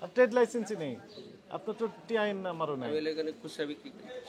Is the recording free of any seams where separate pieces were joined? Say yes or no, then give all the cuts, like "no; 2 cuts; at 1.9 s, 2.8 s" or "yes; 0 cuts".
yes; 0 cuts